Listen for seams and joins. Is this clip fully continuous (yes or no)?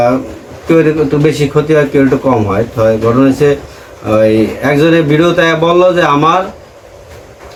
yes